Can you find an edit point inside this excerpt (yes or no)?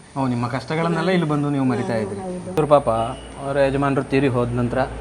yes